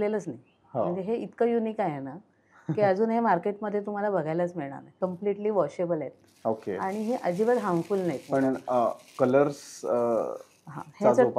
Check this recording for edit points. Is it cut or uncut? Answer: cut